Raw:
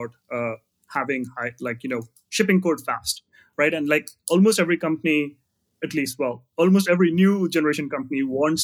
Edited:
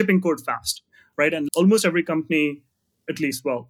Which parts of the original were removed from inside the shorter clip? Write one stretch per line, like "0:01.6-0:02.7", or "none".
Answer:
0:03.9-0:04.2

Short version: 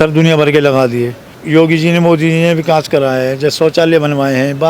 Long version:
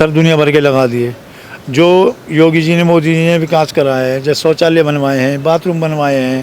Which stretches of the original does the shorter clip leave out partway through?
0:01.4-0:02.2

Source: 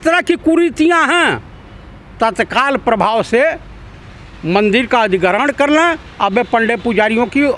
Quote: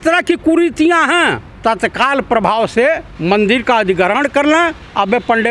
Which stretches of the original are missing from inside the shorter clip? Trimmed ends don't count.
0:01.5-0:02.0
0:03.7-0:04.3

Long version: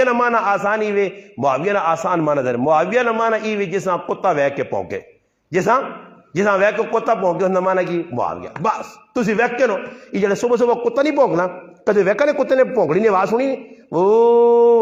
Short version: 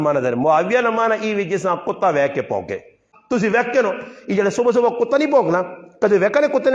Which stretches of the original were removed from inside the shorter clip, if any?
0:05.3-0:08.9

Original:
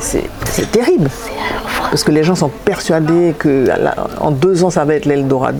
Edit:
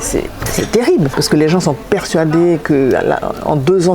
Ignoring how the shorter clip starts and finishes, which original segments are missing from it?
0:01.1-0:01.9

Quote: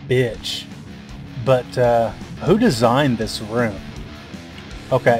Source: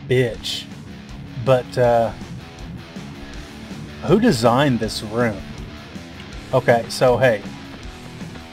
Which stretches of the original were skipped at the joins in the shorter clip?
0:02.3-0:03.9

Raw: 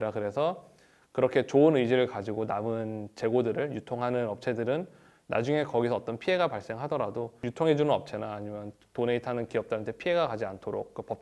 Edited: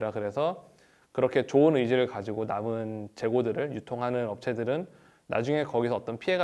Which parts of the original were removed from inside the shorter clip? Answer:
none

